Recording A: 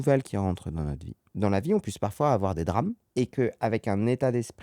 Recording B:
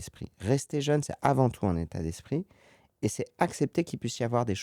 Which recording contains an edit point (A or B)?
A